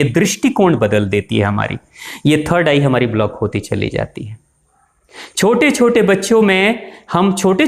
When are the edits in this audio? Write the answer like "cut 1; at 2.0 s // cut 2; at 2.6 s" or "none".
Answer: none